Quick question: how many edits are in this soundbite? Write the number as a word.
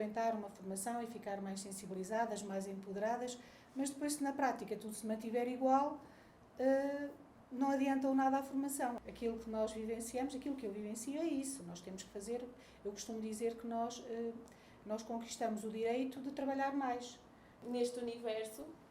two